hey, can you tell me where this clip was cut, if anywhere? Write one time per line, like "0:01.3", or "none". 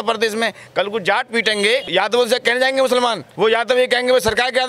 0:01.9
0:03.2